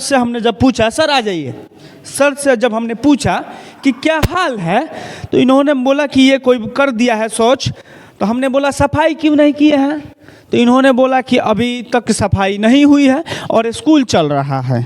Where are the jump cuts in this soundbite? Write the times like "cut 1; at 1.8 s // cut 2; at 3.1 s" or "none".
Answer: none